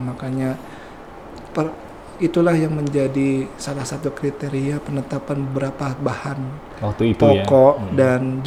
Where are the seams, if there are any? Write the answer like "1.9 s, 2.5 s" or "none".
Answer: none